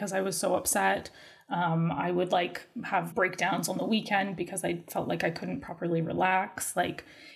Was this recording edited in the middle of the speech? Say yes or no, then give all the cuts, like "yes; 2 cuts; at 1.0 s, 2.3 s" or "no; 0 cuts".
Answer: yes; 1 cut; at 3.1 s